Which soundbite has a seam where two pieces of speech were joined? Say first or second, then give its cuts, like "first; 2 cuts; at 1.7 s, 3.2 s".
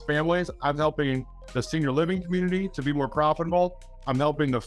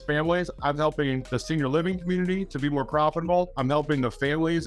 second; 2 cuts; at 1.3 s, 3.5 s